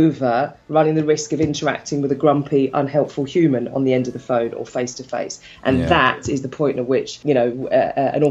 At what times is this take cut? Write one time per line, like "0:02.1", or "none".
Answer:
0:07.2